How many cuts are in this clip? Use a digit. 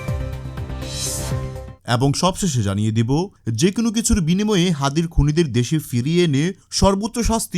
1